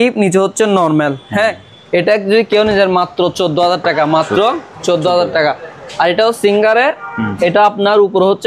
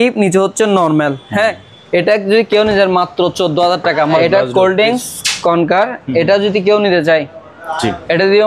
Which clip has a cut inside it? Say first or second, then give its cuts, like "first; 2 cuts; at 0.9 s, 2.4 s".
second; 1 cut; at 4.2 s